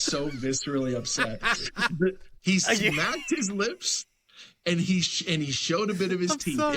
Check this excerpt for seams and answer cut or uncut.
cut